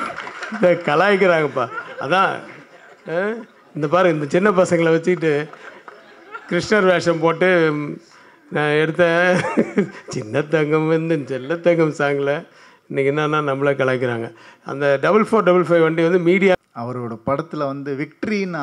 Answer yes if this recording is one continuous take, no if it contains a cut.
no